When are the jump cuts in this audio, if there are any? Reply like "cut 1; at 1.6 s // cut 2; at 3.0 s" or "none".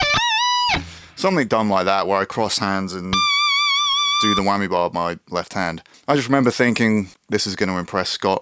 cut 1; at 5.9 s // cut 2; at 7.2 s